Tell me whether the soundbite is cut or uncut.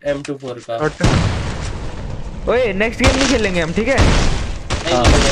uncut